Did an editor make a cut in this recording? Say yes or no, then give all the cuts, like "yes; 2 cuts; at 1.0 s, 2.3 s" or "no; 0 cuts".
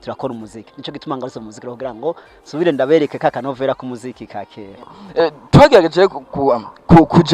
yes; 1 cut; at 5.0 s